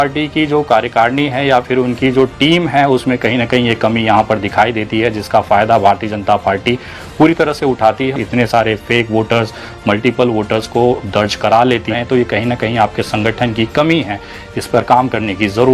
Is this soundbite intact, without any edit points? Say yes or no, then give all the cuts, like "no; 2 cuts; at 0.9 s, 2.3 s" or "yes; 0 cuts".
no; 2 cuts; at 8.1 s, 11.9 s